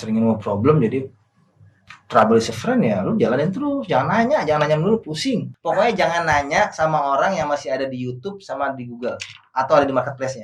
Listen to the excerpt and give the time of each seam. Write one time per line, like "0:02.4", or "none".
0:05.5